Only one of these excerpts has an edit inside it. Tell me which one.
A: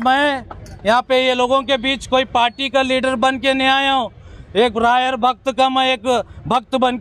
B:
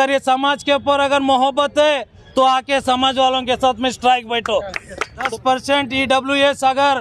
B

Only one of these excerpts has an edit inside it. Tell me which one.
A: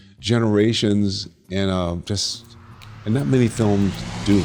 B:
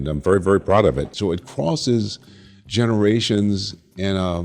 B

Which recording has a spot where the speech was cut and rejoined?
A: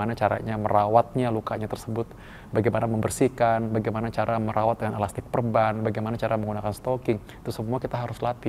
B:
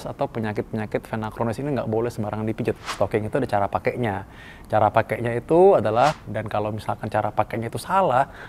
B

